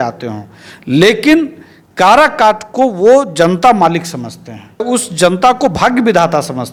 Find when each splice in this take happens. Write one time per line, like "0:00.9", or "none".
none